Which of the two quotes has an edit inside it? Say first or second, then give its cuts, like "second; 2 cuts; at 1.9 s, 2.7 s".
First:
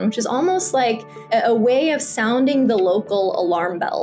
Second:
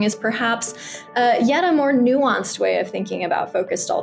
first; 1 cut; at 1.3 s